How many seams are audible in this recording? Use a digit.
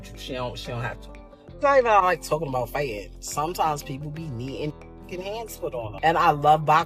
1